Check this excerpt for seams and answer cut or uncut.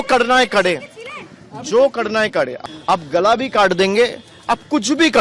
cut